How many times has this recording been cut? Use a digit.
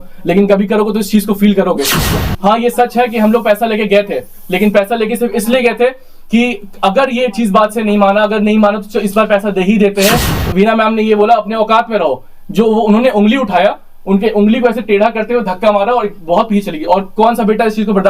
2